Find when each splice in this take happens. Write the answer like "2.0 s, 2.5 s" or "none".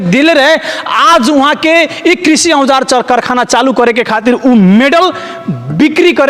none

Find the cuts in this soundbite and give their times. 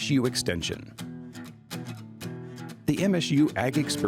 1.0 s, 2.7 s

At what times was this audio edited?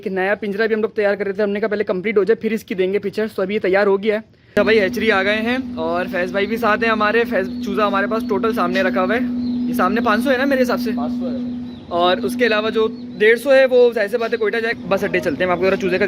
4.4 s, 14.7 s

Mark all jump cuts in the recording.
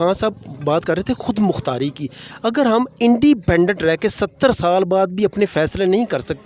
none

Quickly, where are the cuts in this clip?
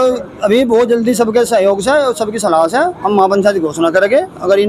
none

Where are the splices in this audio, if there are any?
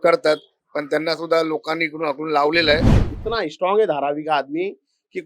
2.9 s

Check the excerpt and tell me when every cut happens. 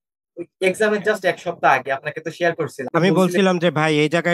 2.8 s

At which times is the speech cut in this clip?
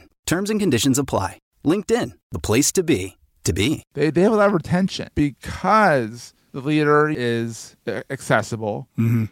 3.8 s, 5.0 s, 7.2 s

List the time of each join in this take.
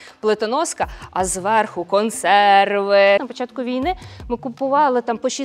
3.3 s

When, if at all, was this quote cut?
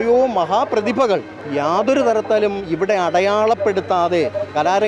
1.4 s

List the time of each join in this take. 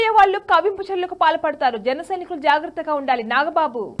none

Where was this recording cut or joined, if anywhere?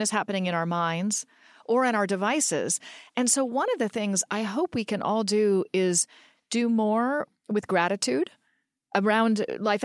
8.9 s

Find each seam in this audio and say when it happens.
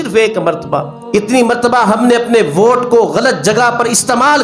1.0 s

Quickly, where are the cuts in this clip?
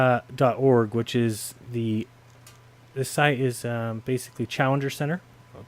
4.3 s

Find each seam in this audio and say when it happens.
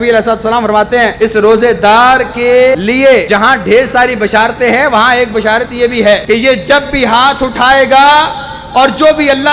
1.1 s, 3.3 s, 6.2 s

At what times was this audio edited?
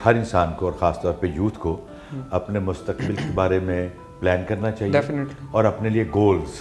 none

